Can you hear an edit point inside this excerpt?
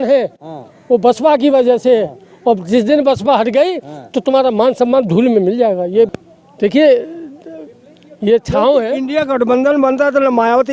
yes; 1 cut; at 6.1 s

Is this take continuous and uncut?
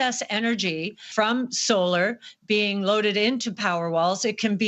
no; 1 cut; at 1.1 s

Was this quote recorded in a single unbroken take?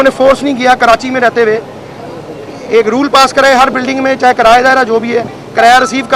yes; 0 cuts

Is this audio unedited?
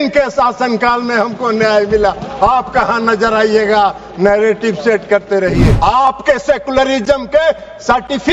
no; 1 cut; at 5.7 s

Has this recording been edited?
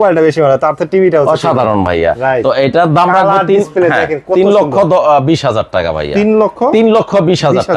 no; 0 cuts

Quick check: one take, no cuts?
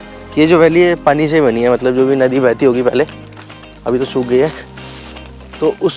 yes; 0 cuts

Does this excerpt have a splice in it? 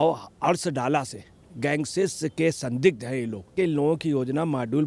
yes; 1 cut; at 3.5 s

